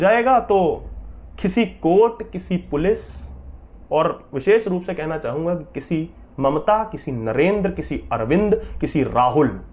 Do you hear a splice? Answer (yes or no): no